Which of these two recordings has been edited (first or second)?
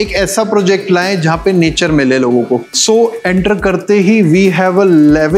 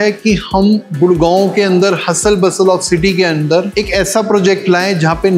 first